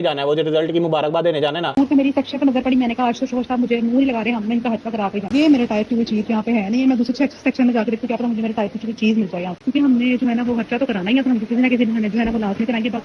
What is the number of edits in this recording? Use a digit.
3